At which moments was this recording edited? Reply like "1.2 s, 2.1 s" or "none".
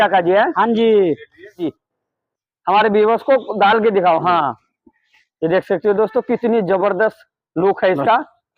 1.7 s